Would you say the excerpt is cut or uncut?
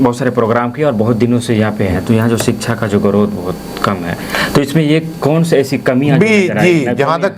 uncut